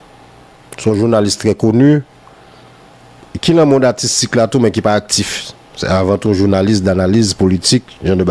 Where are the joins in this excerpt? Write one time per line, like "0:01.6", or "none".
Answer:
none